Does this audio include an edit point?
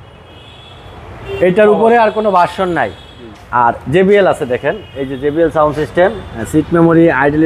yes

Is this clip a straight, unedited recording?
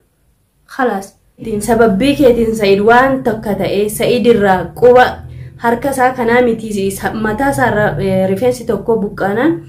no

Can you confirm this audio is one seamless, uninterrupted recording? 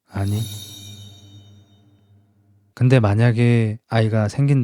no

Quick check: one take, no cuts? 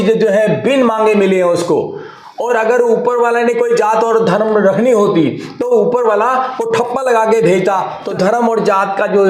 no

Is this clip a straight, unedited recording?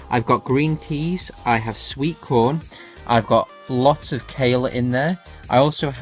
no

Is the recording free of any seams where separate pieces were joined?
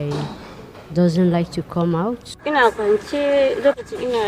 no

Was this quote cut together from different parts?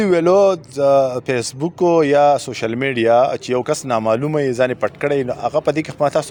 no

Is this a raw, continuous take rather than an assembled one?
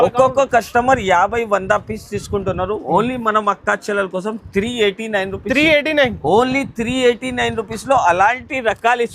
yes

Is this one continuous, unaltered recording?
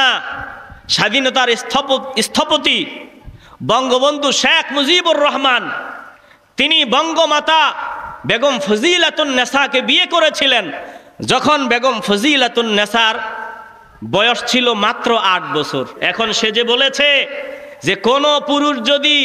no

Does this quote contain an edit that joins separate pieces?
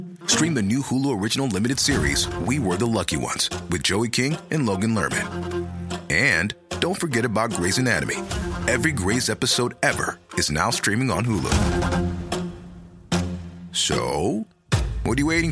no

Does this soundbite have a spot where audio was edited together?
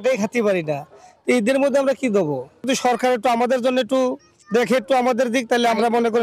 no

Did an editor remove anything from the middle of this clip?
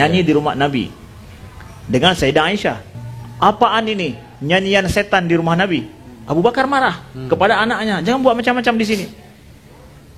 yes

